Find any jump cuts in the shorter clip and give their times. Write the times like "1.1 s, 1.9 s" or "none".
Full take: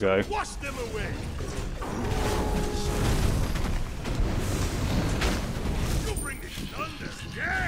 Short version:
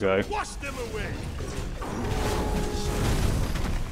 none